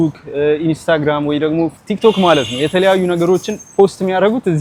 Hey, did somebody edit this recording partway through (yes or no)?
no